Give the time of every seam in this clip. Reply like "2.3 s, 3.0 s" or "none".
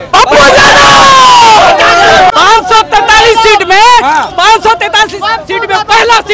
2.3 s